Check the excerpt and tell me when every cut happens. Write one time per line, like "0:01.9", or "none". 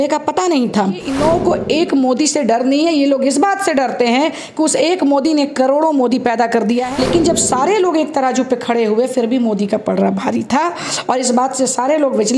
0:01.1
0:06.9